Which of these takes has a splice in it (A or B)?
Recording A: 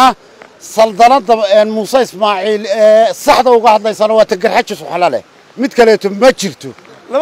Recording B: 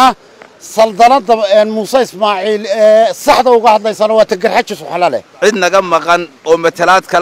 B